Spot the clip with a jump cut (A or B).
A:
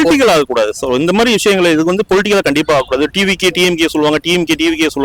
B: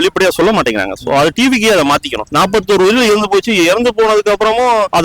B